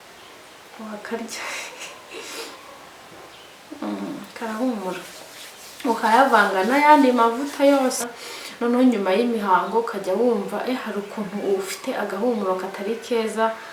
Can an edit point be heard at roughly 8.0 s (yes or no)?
yes